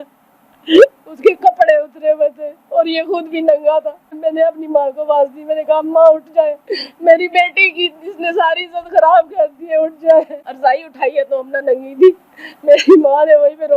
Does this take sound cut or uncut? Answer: cut